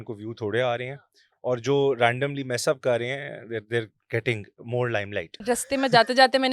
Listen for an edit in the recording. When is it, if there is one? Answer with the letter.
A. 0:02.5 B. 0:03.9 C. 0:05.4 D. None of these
C